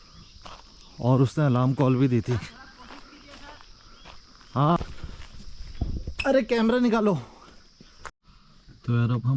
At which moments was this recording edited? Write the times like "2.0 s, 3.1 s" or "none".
4.8 s, 8.2 s